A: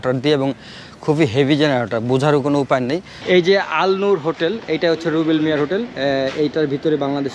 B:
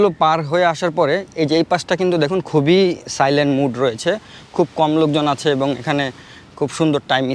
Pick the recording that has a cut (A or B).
A